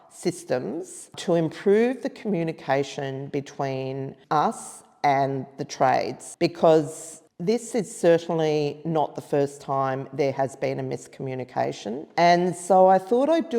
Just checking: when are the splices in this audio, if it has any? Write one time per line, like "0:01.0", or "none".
0:01.1
0:04.2
0:06.2
0:12.1